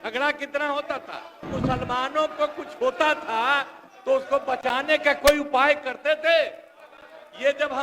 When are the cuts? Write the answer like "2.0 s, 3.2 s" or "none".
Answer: 1.5 s